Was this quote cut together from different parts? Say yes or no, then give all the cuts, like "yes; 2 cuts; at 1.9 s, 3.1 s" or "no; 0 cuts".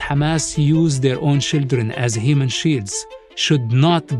no; 0 cuts